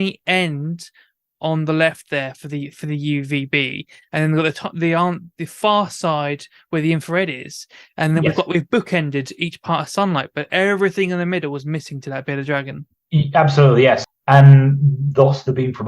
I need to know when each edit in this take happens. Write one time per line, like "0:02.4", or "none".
0:14.0